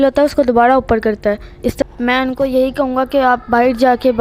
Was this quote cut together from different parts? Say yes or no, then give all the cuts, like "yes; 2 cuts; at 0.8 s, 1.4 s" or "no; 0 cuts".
yes; 1 cut; at 1.8 s